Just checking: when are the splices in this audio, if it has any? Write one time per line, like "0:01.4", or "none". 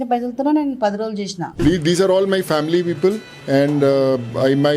0:01.4